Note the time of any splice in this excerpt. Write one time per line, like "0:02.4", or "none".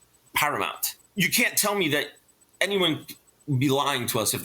0:00.9